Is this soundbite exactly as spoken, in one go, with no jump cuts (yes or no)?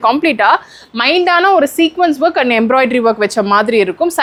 yes